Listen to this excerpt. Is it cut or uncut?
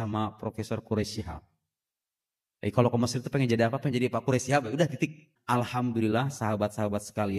cut